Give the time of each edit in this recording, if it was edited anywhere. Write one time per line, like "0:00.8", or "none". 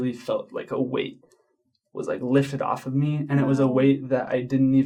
none